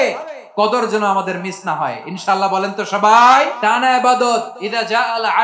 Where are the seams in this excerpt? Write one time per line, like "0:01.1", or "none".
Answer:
0:03.5
0:04.6